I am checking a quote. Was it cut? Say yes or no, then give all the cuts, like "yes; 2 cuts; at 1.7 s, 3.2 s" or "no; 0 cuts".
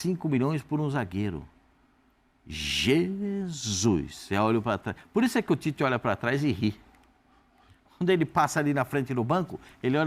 no; 0 cuts